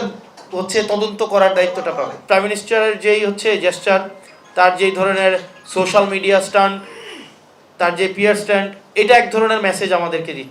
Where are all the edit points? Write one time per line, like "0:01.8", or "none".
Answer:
0:02.2